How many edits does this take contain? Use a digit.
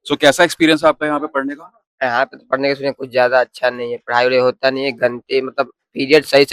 0